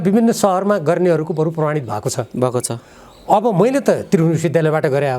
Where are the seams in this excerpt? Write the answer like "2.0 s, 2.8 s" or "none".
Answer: none